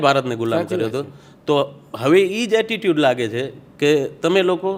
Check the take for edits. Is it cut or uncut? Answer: uncut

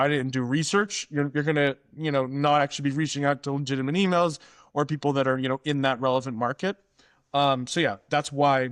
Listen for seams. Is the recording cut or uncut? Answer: uncut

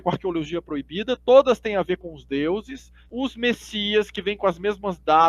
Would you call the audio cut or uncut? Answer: cut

